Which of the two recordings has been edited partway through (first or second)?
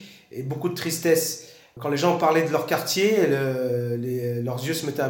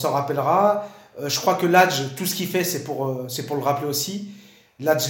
first